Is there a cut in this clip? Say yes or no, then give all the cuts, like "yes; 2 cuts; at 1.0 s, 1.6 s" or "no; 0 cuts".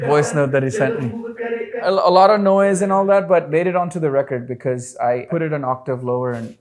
yes; 3 cuts; at 1.8 s, 3.5 s, 5.2 s